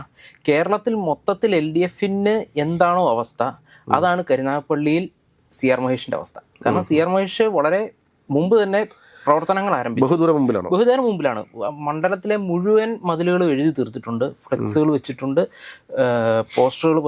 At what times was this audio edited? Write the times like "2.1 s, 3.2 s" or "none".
none